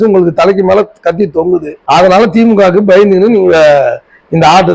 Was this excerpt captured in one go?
no; 1 cut; at 1.7 s

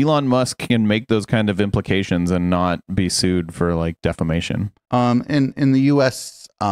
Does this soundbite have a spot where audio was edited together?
no; 0 cuts

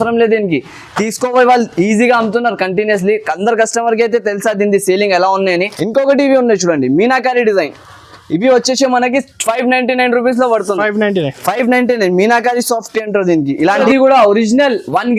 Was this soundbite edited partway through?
yes; 2 cuts; at 5.7 s, 13.8 s

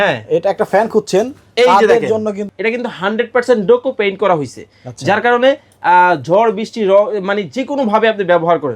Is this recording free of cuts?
no; 1 cut; at 2.4 s

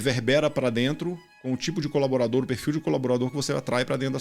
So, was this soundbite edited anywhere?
no; 0 cuts

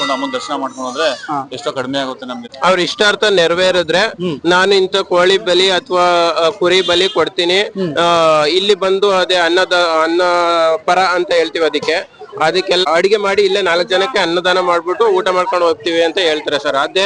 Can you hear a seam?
yes; 2 cuts; at 2.5 s, 12.8 s

